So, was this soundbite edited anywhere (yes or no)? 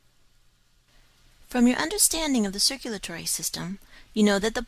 no